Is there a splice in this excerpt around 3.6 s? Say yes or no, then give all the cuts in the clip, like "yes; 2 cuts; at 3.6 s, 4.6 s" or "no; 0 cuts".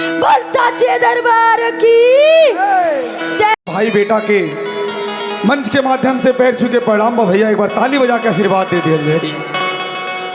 yes; 1 cut; at 3.6 s